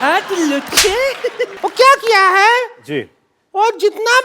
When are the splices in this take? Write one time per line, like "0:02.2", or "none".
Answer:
0:01.5